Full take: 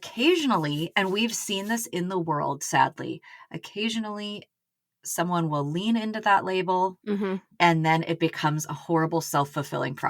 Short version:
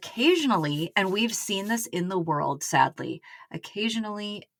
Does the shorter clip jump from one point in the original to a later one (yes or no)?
no